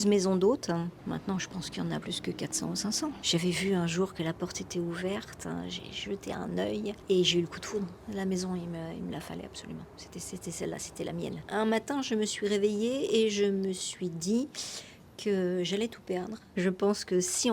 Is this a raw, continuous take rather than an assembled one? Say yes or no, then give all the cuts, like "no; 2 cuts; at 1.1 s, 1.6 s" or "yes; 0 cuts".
no; 6 cuts; at 1.0 s, 2.0 s, 3.2 s, 7.0 s, 11.4 s, 16.4 s